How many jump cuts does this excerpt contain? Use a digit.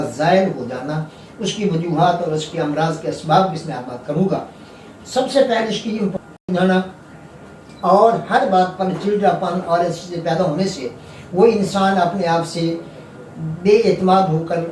1